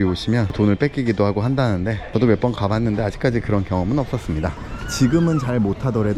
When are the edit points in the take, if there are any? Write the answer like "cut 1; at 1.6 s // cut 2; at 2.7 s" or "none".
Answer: cut 1; at 4.5 s